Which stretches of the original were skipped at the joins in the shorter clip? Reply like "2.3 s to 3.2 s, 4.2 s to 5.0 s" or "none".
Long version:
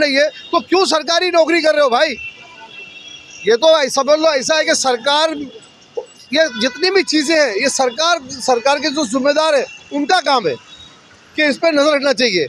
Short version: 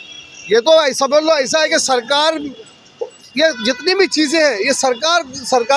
none